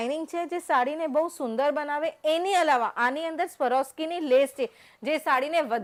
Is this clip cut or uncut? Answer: uncut